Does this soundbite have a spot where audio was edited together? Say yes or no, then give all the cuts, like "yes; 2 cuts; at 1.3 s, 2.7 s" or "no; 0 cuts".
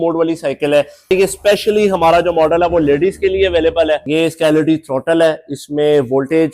yes; 2 cuts; at 1.1 s, 4.0 s